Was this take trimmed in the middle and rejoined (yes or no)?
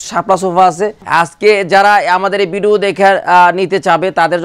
yes